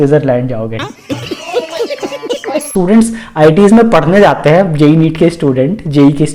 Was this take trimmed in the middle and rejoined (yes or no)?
yes